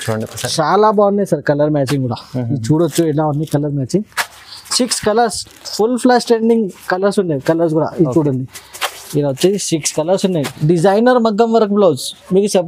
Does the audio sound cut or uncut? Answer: cut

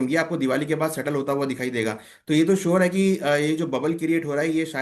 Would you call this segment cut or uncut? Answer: uncut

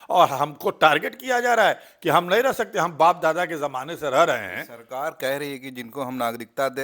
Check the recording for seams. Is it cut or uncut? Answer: uncut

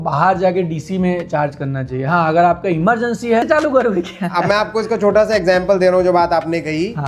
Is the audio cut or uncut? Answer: cut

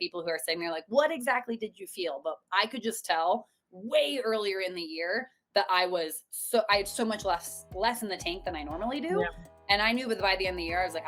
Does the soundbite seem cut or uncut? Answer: uncut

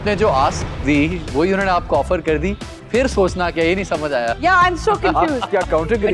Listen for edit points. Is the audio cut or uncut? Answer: uncut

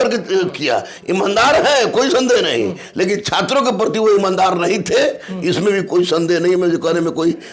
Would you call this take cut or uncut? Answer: uncut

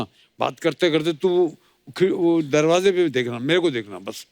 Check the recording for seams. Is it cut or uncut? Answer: uncut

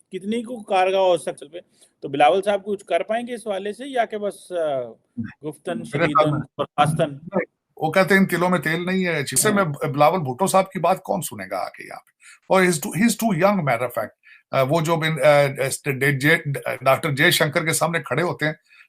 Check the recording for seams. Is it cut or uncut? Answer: cut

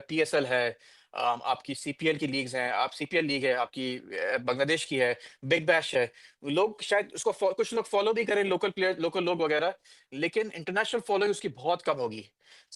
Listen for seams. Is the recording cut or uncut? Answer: uncut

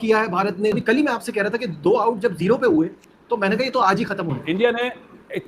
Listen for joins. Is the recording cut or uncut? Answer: cut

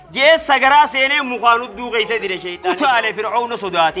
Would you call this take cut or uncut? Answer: cut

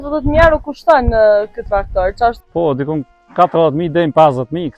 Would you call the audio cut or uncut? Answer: cut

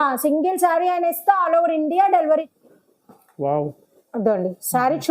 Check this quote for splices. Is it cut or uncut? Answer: cut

